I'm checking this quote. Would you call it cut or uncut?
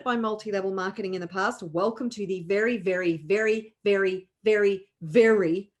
uncut